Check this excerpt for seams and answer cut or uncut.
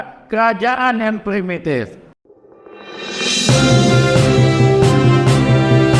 cut